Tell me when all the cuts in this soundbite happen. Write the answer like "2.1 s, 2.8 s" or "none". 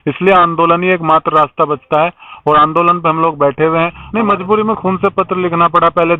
4.0 s